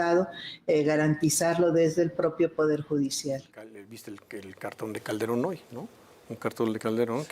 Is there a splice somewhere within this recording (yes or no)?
yes